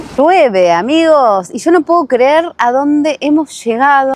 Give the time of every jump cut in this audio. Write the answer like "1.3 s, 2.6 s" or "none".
none